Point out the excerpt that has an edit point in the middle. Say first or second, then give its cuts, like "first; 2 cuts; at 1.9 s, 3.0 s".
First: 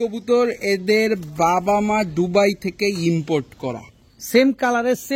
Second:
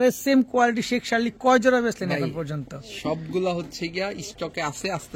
first; 1 cut; at 3.9 s